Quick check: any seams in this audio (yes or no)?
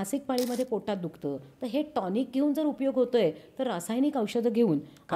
no